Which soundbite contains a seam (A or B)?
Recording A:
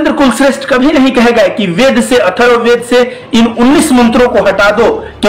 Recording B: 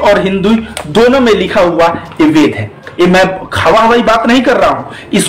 B